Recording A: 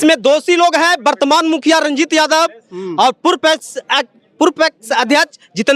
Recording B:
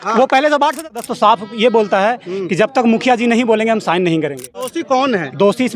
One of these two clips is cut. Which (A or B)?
B